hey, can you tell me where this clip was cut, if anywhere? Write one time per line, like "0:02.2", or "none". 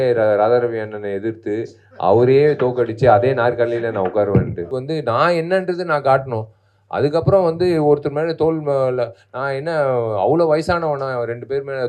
0:04.6